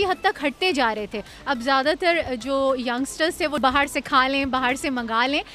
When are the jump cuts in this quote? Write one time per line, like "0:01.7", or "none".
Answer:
0:03.6